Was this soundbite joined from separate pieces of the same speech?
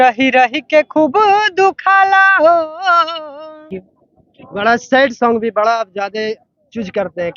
yes; 1 cut; at 3.7 s

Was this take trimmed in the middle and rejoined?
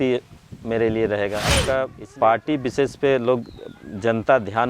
yes; 1 cut; at 1.5 s

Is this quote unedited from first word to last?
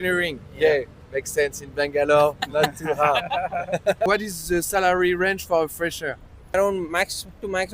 yes; 0 cuts

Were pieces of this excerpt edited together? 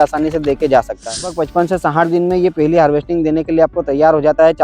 yes; 1 cut; at 1.4 s

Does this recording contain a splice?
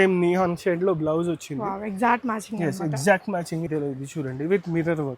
yes; 1 cut; at 3.7 s

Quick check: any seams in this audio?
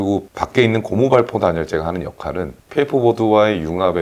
yes; 1 cut; at 2.6 s

